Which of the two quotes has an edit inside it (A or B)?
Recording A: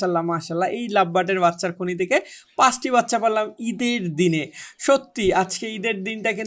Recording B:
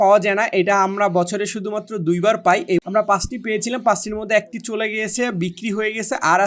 B